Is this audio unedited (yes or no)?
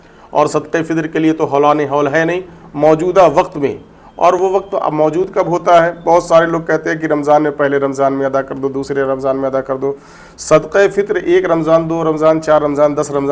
yes